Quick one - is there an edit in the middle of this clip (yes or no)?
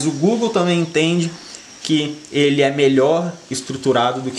no